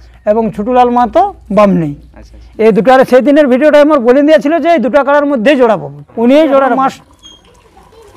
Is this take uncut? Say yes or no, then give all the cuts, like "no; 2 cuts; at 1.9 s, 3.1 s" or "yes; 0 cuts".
no; 2 cuts; at 6.0 s, 6.8 s